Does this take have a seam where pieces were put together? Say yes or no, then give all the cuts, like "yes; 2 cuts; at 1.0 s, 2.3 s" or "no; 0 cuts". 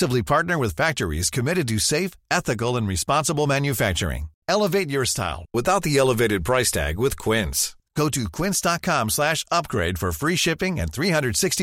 no; 0 cuts